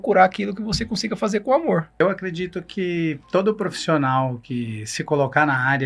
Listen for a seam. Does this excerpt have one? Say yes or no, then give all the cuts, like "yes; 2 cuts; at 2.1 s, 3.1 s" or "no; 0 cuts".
yes; 1 cut; at 2.0 s